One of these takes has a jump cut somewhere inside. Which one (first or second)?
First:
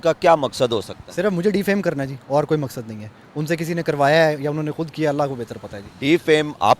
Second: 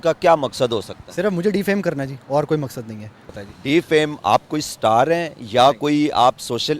second